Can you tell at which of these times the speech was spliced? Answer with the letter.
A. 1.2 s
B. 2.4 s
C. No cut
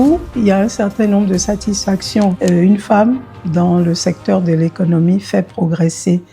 B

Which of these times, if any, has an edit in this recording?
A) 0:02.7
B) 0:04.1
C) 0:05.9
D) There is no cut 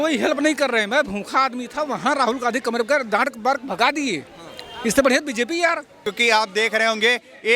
C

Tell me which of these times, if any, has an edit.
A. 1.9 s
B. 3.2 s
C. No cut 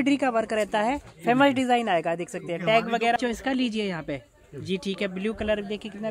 B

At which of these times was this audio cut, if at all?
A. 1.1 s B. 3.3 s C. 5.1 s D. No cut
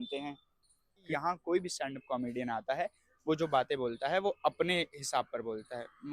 A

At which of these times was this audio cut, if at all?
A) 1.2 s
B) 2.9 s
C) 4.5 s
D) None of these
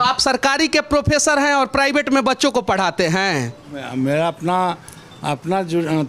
D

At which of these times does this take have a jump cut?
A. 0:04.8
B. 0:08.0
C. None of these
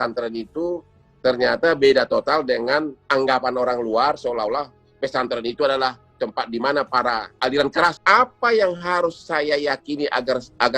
B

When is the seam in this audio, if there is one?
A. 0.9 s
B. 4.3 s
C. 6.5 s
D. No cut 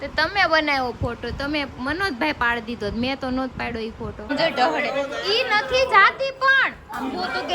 B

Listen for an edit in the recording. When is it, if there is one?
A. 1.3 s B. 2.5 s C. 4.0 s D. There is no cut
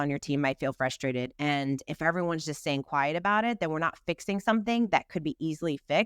A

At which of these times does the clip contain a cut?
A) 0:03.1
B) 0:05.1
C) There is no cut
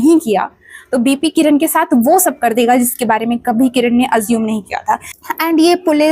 B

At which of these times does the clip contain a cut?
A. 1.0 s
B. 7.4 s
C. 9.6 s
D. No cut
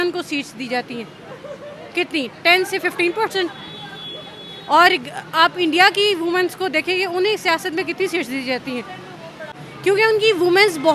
C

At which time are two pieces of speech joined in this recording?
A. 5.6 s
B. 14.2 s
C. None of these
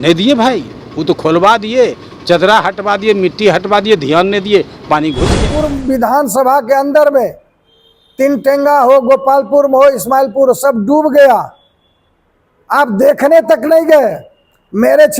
A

